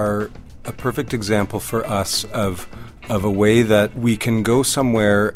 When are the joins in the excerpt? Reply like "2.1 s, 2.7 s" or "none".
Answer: 3.9 s